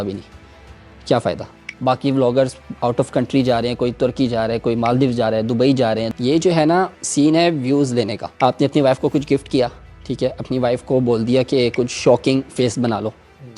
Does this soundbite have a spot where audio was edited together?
yes; 4 cuts; at 1.6 s, 6.1 s, 7.0 s, 8.2 s

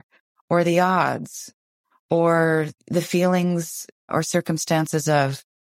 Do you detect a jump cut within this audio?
yes; 2 cuts; at 2.8 s, 4.1 s

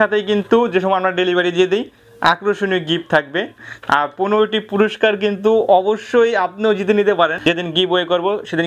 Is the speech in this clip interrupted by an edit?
yes; 2 cuts; at 3.6 s, 7.4 s

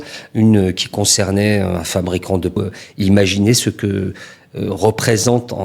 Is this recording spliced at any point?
yes; 1 cut; at 2.6 s

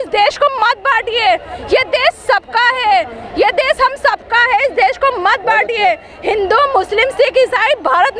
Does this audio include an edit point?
no; 0 cuts

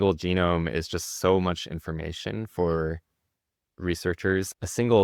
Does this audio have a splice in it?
no; 0 cuts

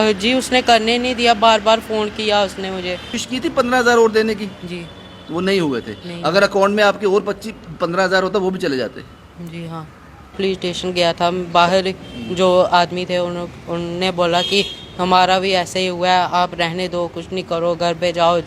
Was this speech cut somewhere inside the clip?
yes; 2 cuts; at 3.2 s, 10.4 s

